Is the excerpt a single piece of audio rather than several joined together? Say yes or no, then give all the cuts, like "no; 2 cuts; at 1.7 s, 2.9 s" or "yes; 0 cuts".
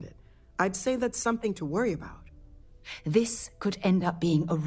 no; 1 cut; at 2.4 s